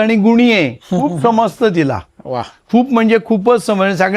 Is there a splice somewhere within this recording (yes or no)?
no